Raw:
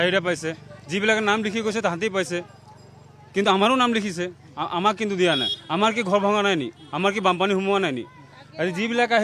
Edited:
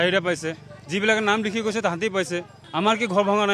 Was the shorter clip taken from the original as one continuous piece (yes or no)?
no